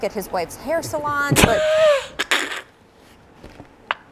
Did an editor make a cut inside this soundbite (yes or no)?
yes